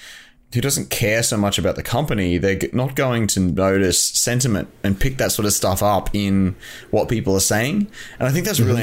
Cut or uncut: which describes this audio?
uncut